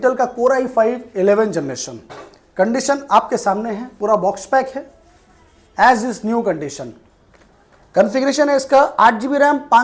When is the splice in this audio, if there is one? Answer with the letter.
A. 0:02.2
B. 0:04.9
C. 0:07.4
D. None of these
D